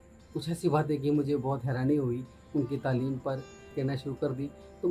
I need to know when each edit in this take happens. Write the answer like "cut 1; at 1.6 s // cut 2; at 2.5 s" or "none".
cut 1; at 3.7 s

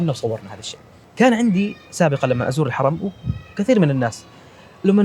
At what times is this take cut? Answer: cut 1; at 1.0 s

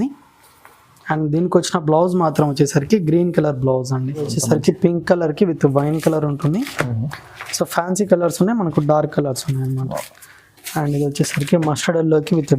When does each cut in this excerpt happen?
cut 1; at 4.2 s

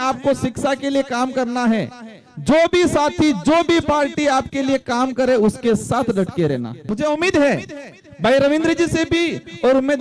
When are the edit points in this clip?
cut 1; at 6.8 s

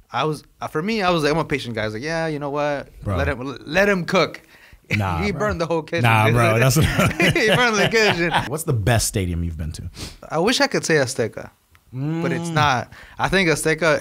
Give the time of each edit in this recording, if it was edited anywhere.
cut 1; at 8.5 s // cut 2; at 10.2 s

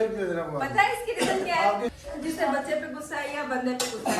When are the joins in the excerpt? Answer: cut 1; at 1.9 s

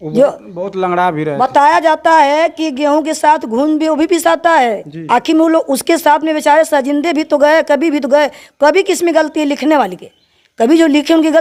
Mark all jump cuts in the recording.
none

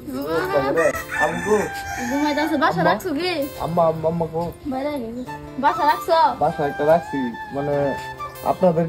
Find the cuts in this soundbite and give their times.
cut 1; at 0.9 s

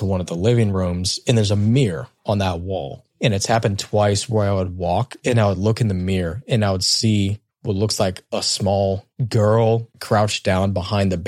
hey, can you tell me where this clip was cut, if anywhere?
cut 1; at 9.9 s

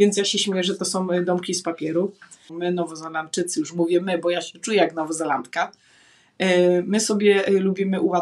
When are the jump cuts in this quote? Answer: cut 1; at 2.5 s

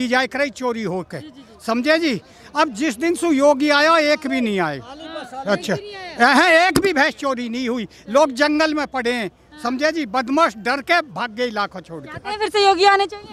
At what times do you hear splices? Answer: none

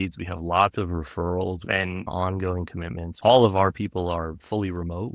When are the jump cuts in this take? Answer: cut 1; at 1.8 s // cut 2; at 3.1 s

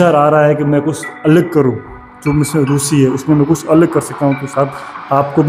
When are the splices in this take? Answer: none

